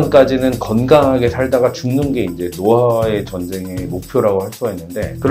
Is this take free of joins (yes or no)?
yes